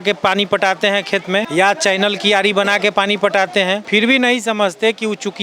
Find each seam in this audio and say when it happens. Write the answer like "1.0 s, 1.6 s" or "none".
1.5 s, 3.8 s